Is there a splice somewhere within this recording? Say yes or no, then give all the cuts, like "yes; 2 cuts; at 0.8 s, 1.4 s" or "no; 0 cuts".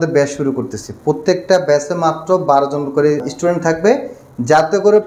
yes; 1 cut; at 3.3 s